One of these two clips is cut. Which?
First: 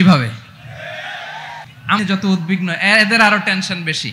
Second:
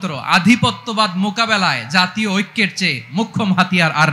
first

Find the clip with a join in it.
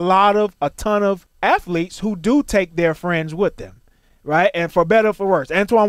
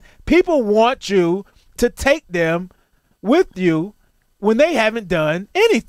first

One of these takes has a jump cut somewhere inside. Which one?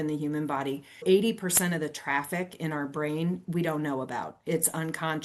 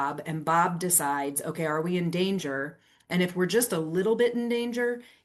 first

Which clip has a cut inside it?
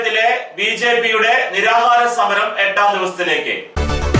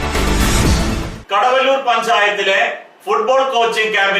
second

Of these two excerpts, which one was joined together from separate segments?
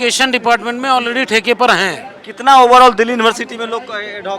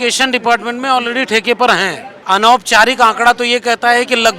second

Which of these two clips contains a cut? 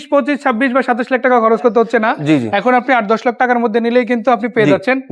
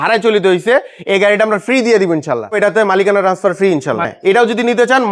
second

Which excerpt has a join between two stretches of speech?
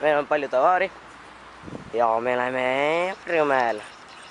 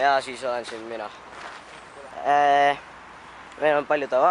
second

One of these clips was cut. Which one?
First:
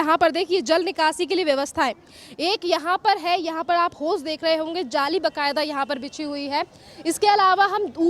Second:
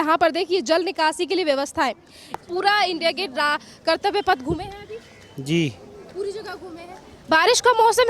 second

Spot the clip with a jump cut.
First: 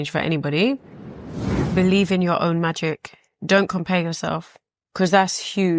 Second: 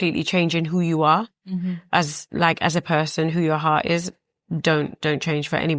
first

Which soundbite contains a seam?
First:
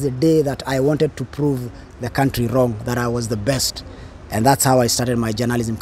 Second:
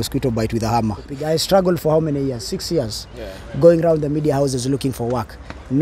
second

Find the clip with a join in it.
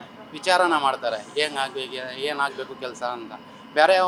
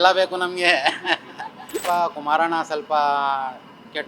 second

